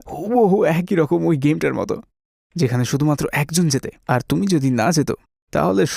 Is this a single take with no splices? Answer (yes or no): yes